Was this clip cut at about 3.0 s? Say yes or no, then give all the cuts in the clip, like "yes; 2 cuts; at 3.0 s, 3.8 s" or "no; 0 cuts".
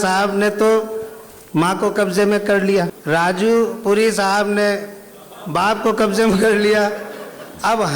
yes; 1 cut; at 3.0 s